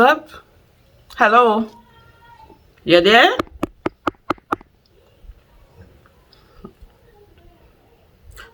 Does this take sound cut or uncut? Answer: uncut